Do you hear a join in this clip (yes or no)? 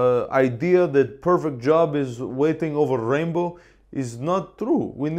no